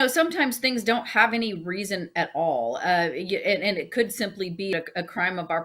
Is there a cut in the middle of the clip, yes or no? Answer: yes